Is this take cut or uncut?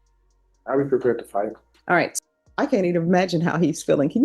cut